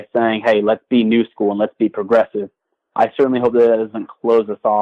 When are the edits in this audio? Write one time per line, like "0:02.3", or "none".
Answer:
none

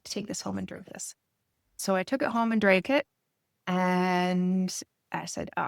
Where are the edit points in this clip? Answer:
0:01.8

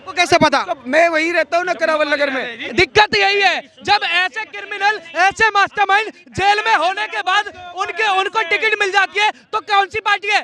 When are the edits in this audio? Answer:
0:02.6

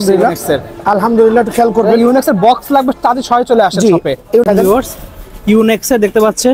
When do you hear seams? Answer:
0:04.4

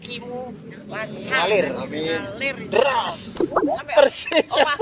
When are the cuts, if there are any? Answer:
0:03.8

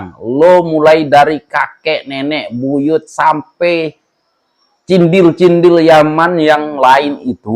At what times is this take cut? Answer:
none

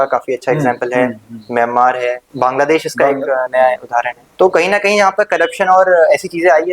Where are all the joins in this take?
0:02.2
0:04.2

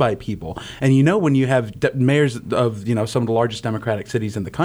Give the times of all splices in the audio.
none

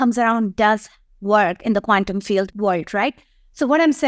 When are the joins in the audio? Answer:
0:02.5

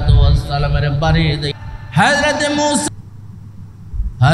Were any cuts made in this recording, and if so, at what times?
0:01.5
0:02.8

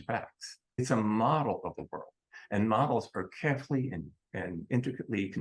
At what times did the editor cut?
0:00.8
0:04.2

